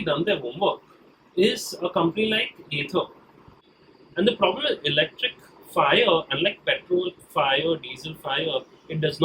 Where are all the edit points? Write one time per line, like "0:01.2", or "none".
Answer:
0:03.7